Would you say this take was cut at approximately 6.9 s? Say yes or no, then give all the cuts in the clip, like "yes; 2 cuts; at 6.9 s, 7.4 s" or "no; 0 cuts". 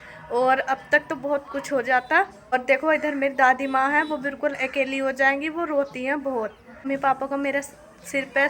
yes; 2 cuts; at 2.5 s, 6.9 s